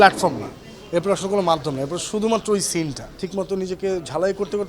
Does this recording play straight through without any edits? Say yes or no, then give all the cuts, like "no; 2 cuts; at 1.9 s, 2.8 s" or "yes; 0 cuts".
no; 1 cut; at 3.2 s